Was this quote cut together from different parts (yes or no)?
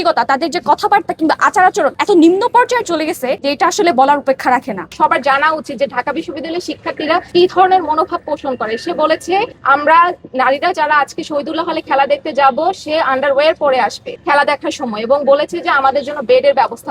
yes